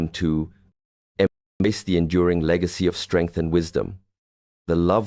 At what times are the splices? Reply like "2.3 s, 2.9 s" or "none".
none